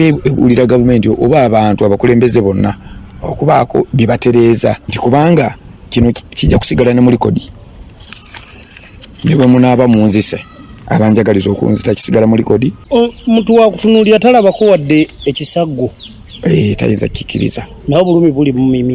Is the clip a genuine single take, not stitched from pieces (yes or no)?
no